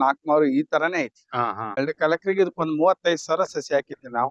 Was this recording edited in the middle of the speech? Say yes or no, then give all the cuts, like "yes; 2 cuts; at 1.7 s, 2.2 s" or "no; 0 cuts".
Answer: yes; 1 cut; at 1.6 s